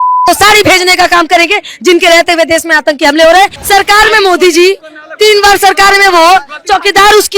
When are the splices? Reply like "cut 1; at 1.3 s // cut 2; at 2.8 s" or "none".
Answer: cut 1; at 3.6 s